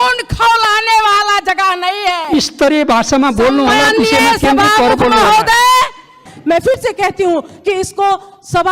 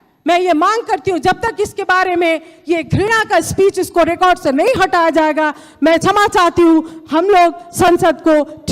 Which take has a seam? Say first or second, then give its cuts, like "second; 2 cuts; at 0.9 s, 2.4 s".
first; 1 cut; at 6.3 s